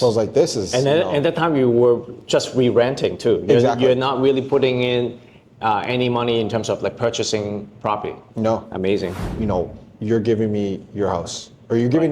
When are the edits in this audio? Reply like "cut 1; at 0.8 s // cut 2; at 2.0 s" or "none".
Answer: cut 1; at 9.3 s